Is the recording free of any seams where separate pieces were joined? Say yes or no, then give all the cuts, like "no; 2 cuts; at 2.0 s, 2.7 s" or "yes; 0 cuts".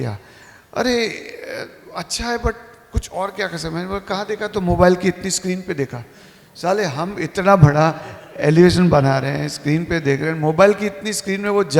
yes; 0 cuts